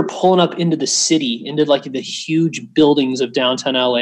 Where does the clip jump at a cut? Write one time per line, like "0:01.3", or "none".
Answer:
none